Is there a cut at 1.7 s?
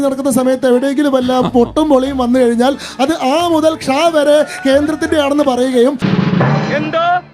no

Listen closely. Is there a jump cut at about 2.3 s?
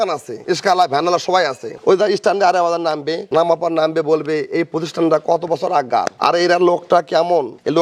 no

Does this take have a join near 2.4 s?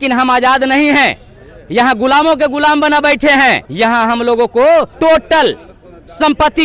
no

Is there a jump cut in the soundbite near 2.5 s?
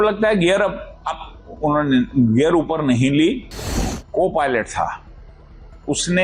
no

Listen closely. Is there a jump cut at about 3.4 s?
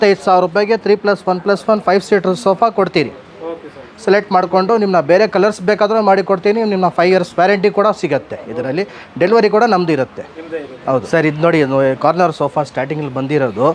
no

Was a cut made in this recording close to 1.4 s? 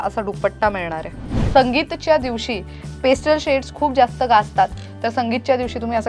yes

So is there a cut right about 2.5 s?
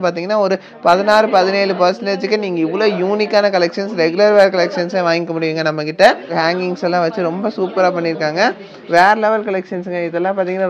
no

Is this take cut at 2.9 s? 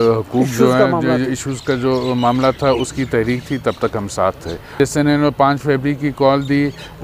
no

